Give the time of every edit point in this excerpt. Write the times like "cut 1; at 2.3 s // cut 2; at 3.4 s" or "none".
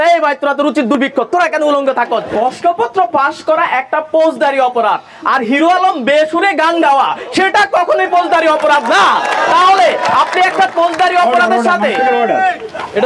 cut 1; at 1.0 s // cut 2; at 2.3 s